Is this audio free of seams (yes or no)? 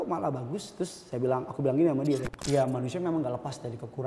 no